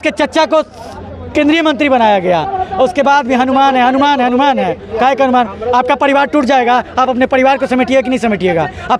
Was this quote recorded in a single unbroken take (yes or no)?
yes